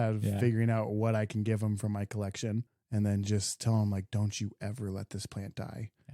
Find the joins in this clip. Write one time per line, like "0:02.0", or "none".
0:02.7